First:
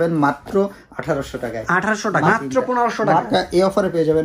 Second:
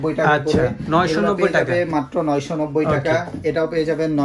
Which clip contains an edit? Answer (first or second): first